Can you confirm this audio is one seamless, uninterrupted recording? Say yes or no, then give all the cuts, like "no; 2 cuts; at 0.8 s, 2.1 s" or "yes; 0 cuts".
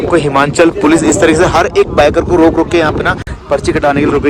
yes; 0 cuts